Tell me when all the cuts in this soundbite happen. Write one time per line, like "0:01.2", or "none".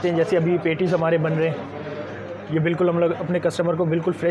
none